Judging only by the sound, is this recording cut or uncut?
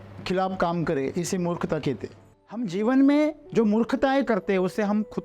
cut